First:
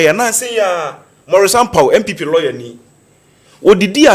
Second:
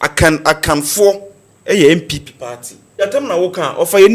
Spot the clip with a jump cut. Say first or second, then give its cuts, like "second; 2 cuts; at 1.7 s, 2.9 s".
second; 1 cut; at 3.0 s